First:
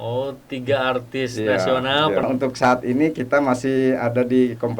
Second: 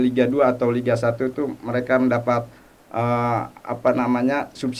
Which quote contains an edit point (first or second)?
first